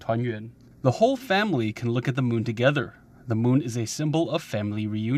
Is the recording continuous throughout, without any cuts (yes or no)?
yes